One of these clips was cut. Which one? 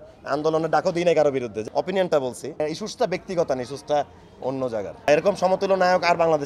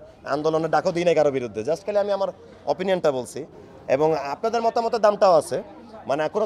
first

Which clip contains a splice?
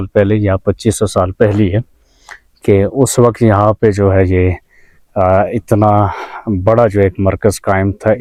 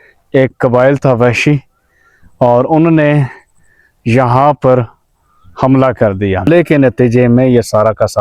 second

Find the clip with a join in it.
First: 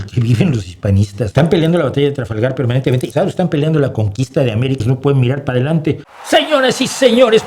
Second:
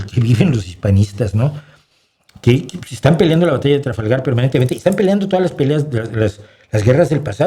first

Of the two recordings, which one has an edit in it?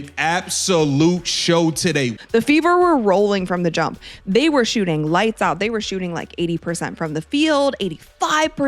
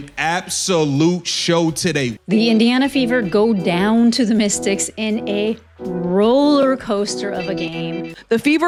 first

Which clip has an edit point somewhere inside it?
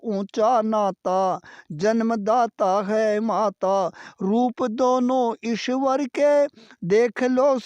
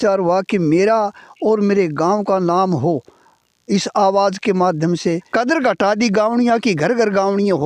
second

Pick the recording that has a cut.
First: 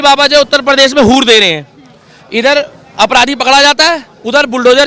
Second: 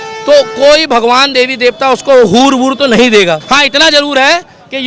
second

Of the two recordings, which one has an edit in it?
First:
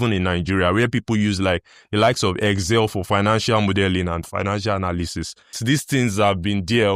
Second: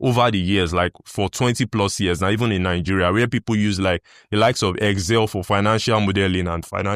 first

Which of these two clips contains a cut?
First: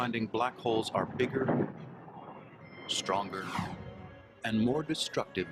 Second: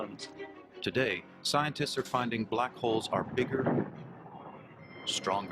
second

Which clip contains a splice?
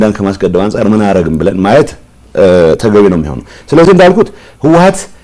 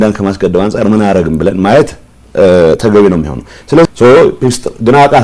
second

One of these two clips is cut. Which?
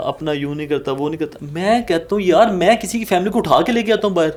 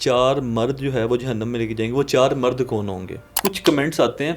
second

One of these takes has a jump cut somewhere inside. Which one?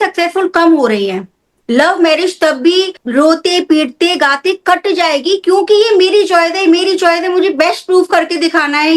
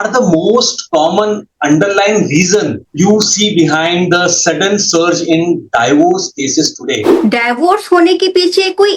second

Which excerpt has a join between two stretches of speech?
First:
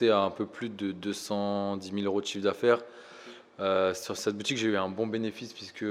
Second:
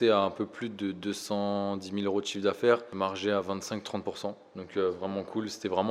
second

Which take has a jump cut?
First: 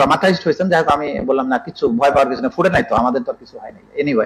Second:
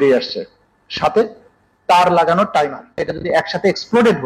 second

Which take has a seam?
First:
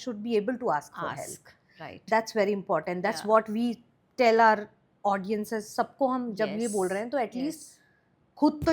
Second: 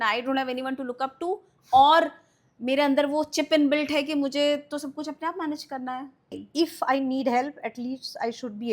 second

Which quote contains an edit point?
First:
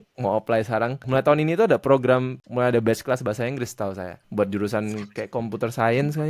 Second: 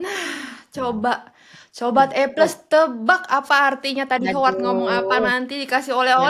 first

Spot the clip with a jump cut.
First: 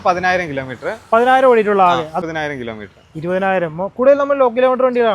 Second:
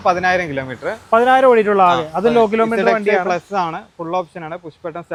first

